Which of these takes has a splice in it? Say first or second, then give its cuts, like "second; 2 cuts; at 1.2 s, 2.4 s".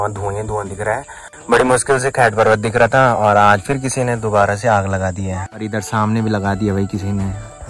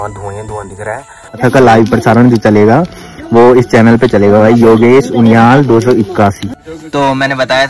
second; 2 cuts; at 1.3 s, 6.5 s